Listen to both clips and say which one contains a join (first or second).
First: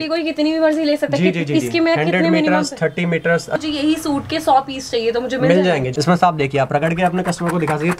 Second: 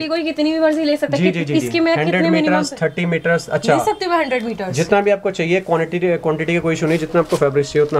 first